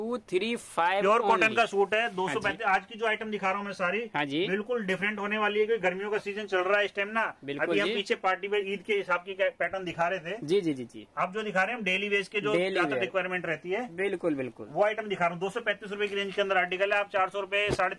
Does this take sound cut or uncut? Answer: uncut